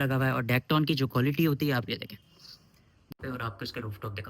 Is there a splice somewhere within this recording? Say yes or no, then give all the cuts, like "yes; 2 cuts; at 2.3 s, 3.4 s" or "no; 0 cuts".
yes; 1 cut; at 3.1 s